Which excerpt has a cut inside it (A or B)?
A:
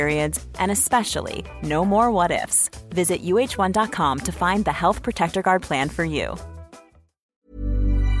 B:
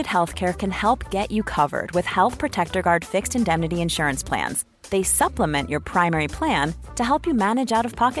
A